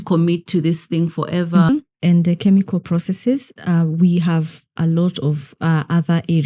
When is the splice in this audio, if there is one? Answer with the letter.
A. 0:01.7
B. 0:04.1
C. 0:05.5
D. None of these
A